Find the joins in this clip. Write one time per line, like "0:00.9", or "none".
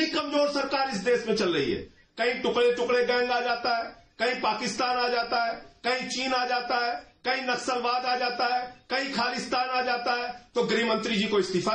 none